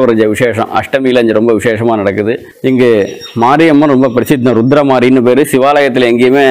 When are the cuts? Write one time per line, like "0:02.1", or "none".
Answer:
0:02.5